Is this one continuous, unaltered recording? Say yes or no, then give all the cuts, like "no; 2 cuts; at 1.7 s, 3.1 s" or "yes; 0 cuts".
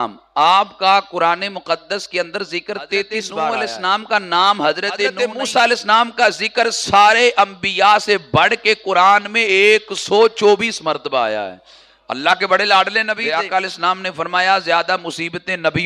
no; 3 cuts; at 3.5 s, 5.1 s, 13.2 s